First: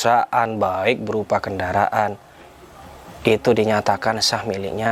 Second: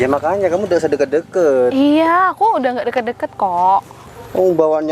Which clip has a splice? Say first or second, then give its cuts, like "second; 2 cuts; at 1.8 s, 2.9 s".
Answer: second; 1 cut; at 4.0 s